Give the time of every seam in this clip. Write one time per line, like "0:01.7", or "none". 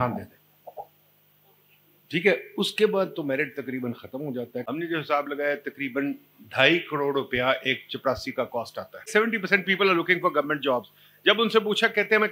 0:04.6
0:09.1